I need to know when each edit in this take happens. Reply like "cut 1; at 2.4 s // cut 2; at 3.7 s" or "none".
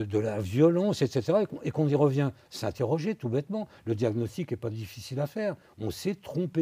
none